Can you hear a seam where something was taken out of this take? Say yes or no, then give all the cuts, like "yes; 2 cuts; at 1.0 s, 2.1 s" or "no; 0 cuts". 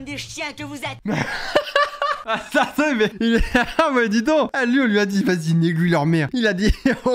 no; 0 cuts